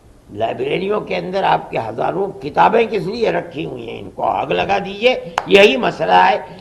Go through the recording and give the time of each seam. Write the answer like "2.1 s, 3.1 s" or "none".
none

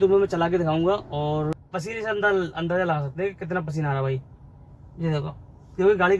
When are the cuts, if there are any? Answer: 1.5 s

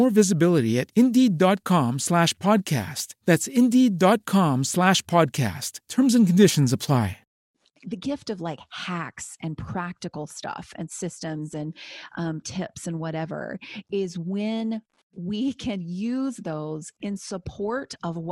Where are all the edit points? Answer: 7.5 s

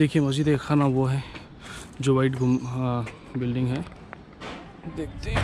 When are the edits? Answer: 4.4 s

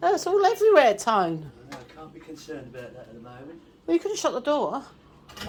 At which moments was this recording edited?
none

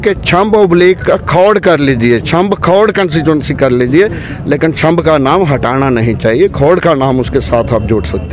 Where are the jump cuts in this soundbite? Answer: none

